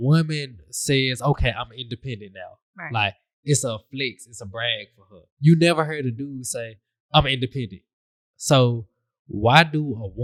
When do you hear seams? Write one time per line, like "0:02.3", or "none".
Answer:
none